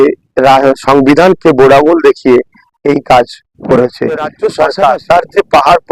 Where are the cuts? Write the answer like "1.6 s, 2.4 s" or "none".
4.3 s